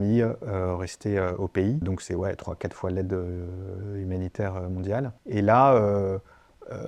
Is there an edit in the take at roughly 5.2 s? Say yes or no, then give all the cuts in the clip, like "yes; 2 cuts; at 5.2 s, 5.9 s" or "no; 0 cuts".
yes; 2 cuts; at 1.8 s, 5.2 s